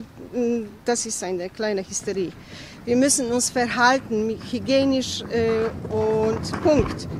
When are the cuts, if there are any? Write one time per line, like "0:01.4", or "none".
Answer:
none